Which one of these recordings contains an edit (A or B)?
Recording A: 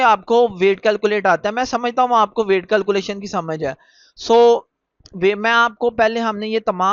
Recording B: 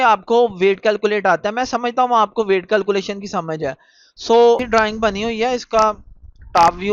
B